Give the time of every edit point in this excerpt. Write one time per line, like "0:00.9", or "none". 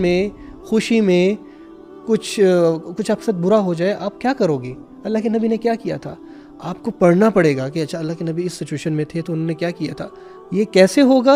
none